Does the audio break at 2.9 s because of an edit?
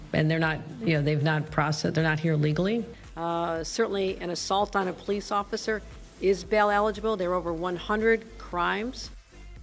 no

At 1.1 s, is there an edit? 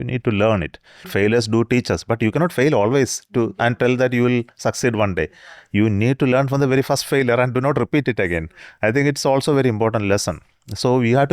yes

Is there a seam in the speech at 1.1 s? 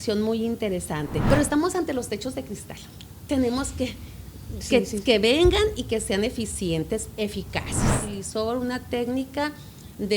yes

